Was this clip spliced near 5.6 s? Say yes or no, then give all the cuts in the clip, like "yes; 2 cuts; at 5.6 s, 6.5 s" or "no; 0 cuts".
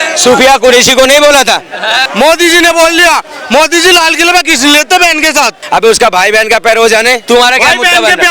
yes; 3 cuts; at 2.0 s, 5.6 s, 7.2 s